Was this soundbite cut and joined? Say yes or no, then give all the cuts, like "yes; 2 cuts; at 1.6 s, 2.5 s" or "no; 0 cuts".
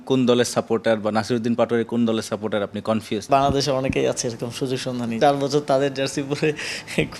yes; 2 cuts; at 3.3 s, 5.2 s